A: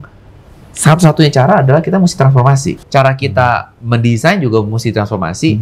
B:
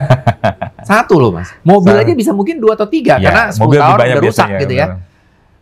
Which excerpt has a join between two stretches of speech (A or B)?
A